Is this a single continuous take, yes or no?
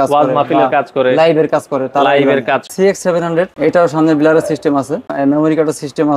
no